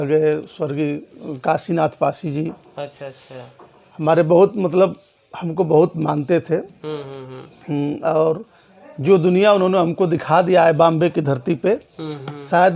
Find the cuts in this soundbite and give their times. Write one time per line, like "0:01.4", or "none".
none